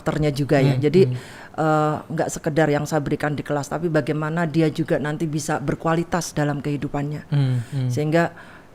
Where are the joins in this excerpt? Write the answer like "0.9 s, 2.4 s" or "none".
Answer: none